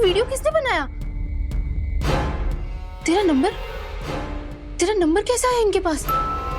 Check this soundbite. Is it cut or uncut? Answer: uncut